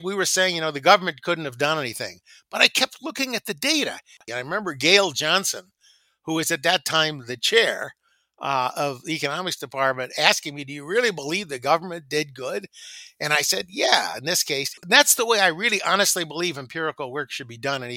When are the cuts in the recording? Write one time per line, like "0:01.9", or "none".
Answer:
0:04.2
0:14.7